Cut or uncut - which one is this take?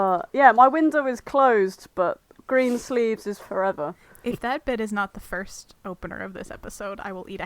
cut